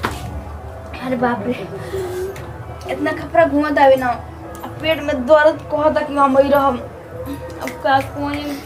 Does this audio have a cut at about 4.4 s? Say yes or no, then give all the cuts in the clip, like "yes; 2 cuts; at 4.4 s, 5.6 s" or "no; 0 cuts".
no; 0 cuts